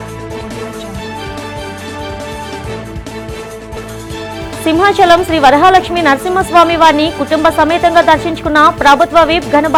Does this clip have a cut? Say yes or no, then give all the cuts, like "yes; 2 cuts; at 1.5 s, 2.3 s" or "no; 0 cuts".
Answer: no; 0 cuts